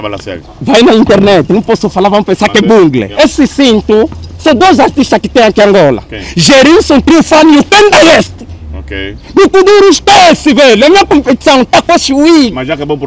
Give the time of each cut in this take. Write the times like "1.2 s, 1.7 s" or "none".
3.1 s